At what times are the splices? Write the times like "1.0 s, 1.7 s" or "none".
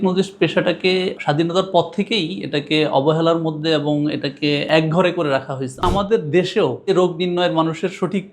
1.2 s, 4.7 s, 5.8 s, 6.9 s